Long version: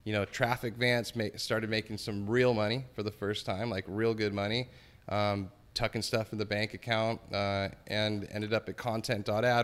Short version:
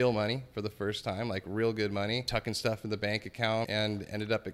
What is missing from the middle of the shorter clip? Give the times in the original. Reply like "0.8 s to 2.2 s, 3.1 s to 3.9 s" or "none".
4.7 s to 5.7 s, 7.2 s to 7.9 s